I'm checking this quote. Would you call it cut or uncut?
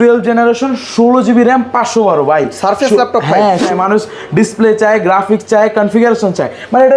cut